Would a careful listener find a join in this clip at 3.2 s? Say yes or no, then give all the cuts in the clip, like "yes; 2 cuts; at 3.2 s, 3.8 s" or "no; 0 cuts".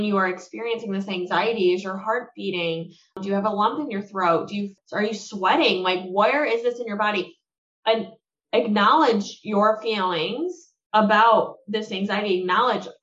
yes; 2 cuts; at 3.2 s, 4.7 s